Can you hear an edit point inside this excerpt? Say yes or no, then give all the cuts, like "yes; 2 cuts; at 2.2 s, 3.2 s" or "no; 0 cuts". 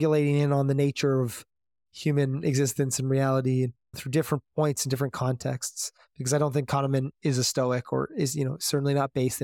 yes; 1 cut; at 4.0 s